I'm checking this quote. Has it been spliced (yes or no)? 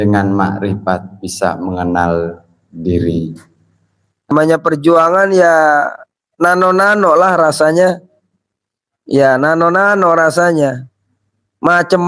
yes